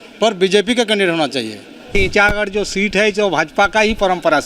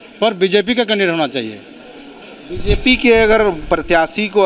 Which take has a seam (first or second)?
first